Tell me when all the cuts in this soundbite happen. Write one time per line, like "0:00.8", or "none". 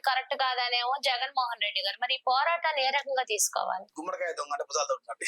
0:03.9